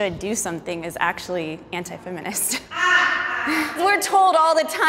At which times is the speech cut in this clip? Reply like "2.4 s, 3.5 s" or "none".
3.8 s